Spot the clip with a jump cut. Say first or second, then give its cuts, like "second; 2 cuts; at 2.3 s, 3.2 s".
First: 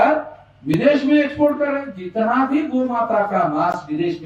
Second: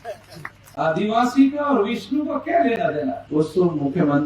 second; 1 cut; at 3.2 s